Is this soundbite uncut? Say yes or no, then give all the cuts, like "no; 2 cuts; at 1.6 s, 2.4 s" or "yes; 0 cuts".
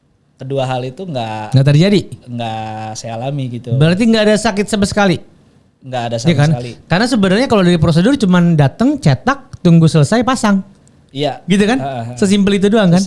yes; 0 cuts